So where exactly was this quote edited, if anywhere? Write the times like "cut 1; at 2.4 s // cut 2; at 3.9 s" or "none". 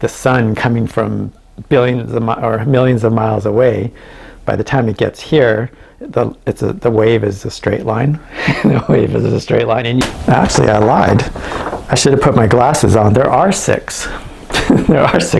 cut 1; at 10.0 s